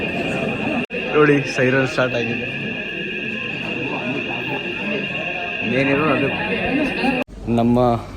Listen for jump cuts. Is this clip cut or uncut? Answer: cut